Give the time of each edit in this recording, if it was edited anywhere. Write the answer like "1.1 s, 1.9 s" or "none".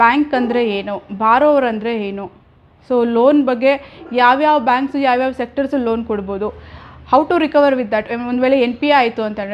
none

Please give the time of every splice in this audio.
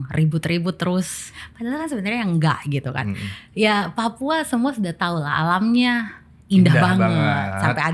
1.3 s

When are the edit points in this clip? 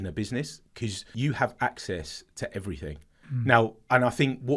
1.0 s, 3.1 s

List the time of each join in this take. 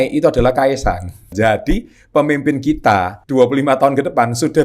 1.3 s, 3.2 s

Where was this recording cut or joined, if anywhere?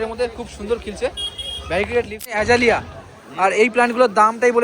2.3 s

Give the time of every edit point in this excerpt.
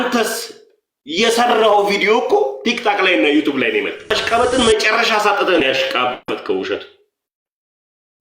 4.1 s

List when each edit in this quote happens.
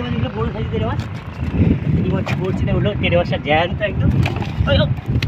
none

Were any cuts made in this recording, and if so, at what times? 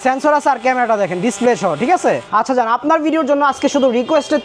2.2 s

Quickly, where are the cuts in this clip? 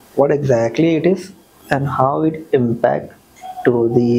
none

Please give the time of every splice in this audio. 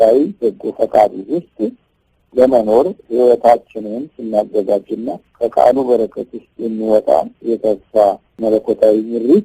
8.3 s

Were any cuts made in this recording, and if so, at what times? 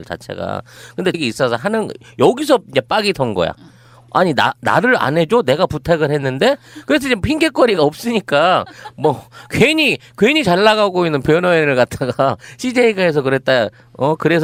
none

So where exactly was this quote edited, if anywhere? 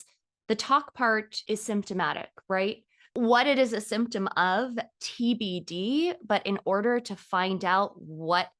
1.3 s, 3.0 s

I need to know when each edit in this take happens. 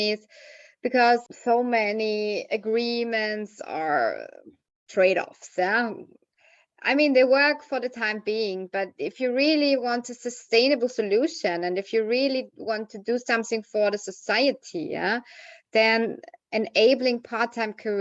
1.3 s

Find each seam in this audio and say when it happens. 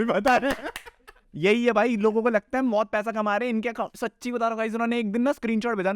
1.3 s

